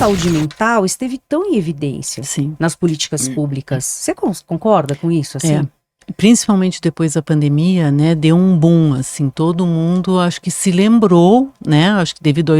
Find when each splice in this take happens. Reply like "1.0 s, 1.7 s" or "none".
none